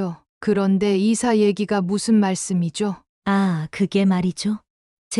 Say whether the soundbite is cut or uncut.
cut